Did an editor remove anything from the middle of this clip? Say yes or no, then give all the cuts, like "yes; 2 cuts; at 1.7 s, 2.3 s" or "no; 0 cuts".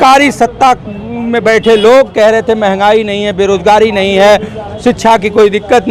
no; 0 cuts